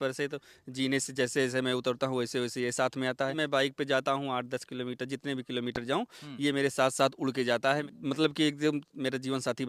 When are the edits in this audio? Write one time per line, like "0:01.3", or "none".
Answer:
0:03.4
0:07.9